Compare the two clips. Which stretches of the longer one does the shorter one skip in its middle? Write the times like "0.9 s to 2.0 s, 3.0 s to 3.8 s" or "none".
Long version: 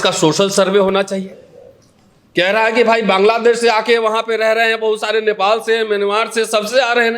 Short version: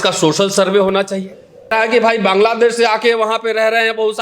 1.7 s to 2.5 s